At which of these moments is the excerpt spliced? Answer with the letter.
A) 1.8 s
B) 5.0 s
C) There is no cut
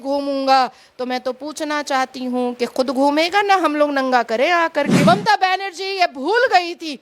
B